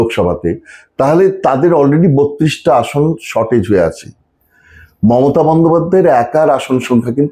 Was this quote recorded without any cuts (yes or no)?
yes